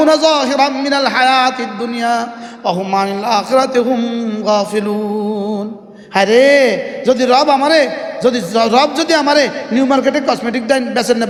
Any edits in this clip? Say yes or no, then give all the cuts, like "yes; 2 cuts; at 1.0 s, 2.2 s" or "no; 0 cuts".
no; 0 cuts